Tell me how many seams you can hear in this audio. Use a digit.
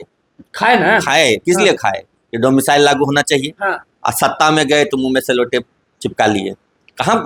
0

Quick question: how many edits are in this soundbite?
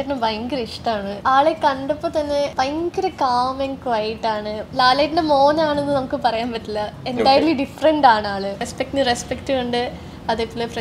4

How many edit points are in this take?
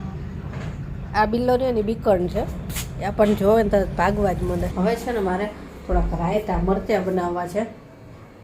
1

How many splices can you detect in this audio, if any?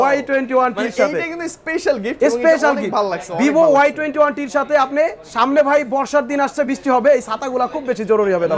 0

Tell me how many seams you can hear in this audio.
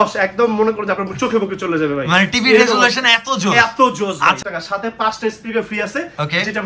1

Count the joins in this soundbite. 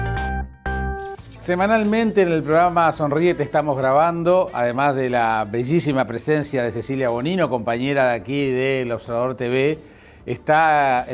1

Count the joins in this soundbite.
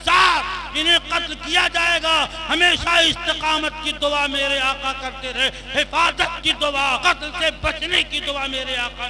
1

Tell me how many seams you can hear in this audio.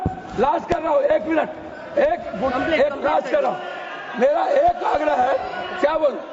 0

